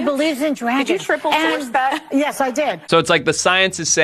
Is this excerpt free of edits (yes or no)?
no